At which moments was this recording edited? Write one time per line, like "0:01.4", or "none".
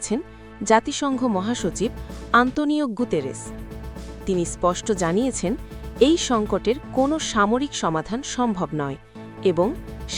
none

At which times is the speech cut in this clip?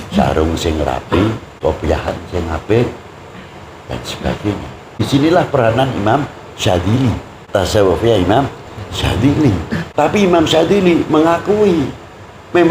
0:01.5
0:05.0
0:07.3
0:09.9

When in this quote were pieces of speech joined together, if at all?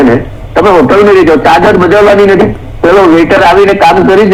none

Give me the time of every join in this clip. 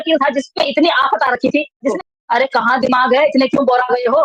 0:01.9

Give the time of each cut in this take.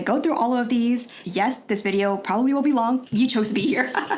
0:03.1

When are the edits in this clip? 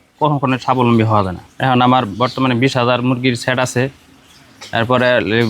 0:01.4

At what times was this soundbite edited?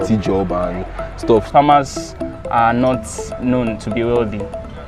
0:01.5

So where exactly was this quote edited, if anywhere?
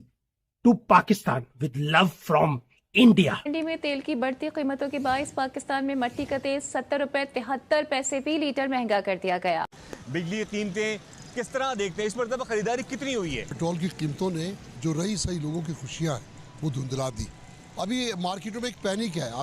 0:03.4
0:09.8
0:13.6

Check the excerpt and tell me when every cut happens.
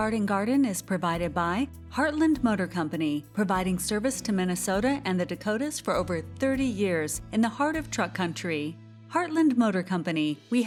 none

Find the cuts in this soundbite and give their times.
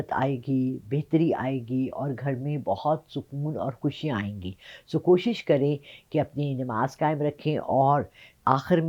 none

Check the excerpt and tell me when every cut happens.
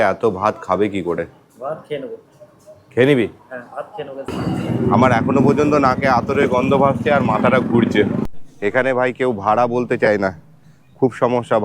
0:04.3
0:08.3

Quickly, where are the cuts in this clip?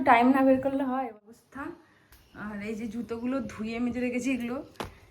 0:01.0

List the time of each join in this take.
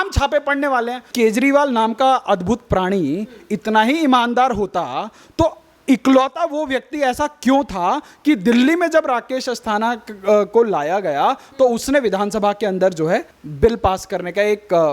0:01.1
0:13.4

